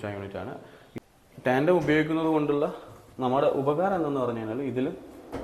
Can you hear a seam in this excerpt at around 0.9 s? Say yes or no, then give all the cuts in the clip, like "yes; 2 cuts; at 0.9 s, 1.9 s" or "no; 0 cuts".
yes; 1 cut; at 0.9 s